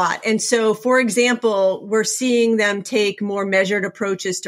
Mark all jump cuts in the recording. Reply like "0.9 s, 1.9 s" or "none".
none